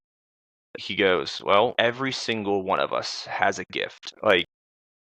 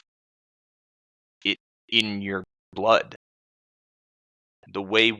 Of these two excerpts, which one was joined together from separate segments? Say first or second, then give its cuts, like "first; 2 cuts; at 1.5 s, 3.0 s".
first; 2 cuts; at 1.7 s, 4.0 s